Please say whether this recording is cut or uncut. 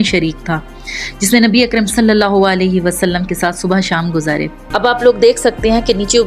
cut